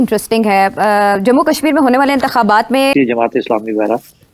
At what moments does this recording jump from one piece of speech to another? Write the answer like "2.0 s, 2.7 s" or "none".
2.9 s